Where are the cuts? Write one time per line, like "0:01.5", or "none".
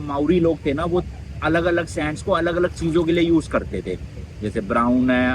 none

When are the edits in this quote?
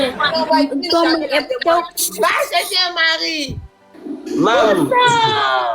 0:04.0

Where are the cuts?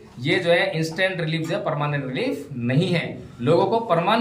none

